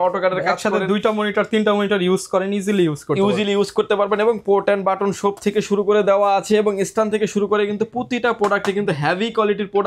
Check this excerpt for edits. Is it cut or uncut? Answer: uncut